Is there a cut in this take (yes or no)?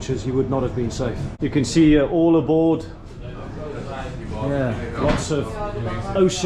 no